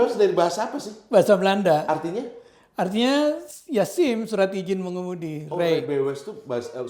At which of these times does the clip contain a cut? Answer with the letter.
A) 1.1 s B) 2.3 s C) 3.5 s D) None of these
D